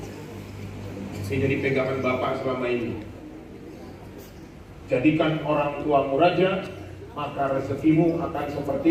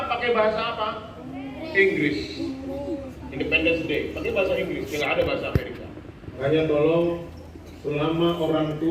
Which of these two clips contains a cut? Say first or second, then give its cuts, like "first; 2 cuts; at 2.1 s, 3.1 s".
second; 1 cut; at 6.4 s